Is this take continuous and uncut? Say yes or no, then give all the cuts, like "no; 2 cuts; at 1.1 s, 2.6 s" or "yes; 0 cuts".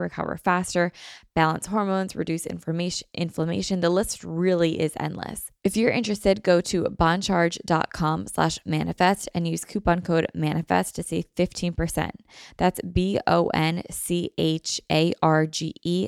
no; 1 cut; at 5.4 s